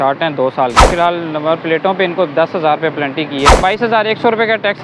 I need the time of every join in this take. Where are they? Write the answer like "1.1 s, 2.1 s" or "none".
0.9 s, 3.6 s